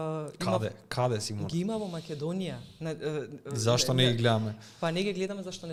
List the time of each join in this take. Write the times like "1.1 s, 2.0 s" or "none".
none